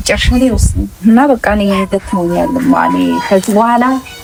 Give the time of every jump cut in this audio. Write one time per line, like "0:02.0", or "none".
none

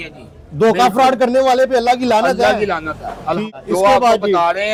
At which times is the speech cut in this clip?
none

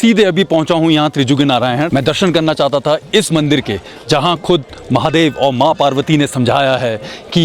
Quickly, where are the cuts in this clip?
0:01.9

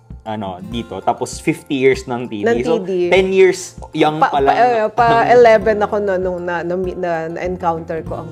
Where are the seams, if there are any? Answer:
none

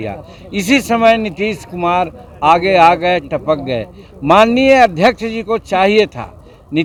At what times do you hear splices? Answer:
none

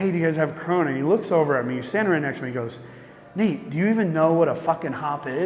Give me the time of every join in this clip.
none

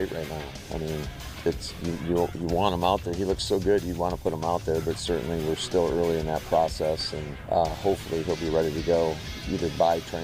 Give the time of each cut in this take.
none

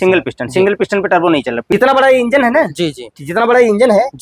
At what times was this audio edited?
0:01.7

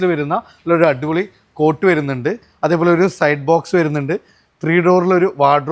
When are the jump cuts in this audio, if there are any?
none

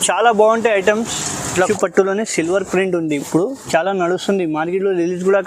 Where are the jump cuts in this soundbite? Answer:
0:01.6

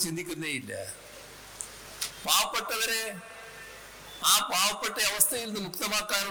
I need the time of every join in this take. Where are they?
none

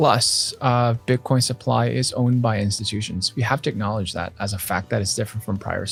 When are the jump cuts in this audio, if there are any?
none

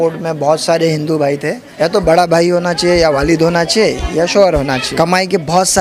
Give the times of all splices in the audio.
0:01.6
0:04.9

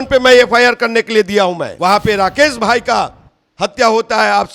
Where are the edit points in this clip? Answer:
0:01.7

